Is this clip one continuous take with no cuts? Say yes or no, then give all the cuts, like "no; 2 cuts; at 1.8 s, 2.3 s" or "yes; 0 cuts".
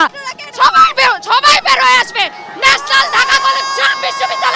yes; 0 cuts